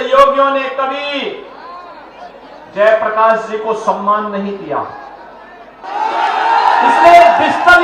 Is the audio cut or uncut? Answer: cut